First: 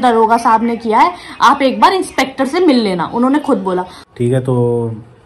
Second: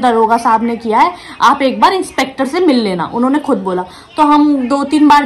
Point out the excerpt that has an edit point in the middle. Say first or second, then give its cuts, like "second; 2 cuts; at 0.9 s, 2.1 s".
first; 1 cut; at 4.0 s